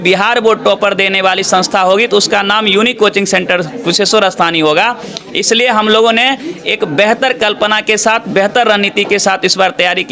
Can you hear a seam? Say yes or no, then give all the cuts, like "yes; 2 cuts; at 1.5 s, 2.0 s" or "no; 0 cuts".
no; 0 cuts